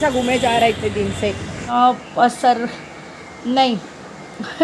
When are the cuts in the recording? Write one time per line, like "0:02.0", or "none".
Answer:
0:01.7